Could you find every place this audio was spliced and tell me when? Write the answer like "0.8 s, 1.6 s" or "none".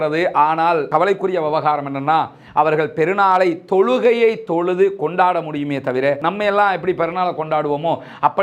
none